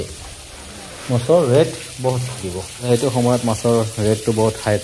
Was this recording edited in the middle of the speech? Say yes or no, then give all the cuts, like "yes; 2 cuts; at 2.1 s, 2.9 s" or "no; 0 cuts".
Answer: yes; 1 cut; at 2.8 s